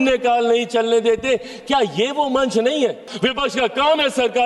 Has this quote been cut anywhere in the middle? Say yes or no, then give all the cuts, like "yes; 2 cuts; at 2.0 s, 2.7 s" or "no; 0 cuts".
yes; 1 cut; at 3.0 s